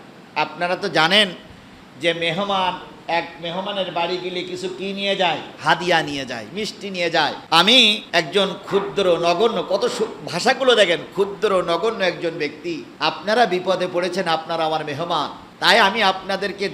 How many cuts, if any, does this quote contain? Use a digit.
5